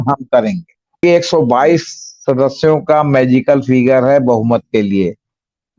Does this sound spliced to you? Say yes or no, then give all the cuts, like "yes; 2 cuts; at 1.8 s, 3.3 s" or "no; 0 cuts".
yes; 1 cut; at 1.0 s